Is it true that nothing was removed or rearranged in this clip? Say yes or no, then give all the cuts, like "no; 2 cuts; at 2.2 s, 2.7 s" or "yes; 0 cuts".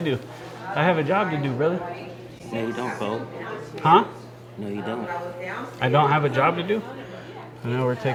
yes; 0 cuts